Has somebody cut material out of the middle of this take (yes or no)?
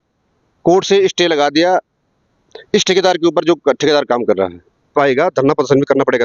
yes